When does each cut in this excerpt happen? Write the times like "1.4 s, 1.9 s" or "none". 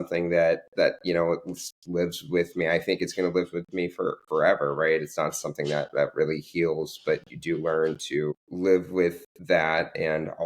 8.5 s